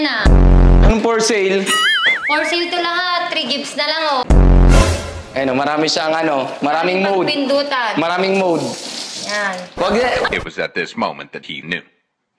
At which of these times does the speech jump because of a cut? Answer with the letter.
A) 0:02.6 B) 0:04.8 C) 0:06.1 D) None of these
B